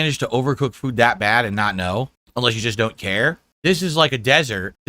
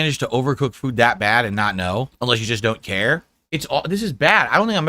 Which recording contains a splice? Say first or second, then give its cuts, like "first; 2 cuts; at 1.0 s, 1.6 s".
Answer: second; 2 cuts; at 2.1 s, 3.3 s